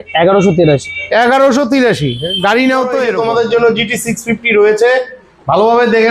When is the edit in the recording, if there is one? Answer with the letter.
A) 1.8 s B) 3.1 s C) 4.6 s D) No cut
B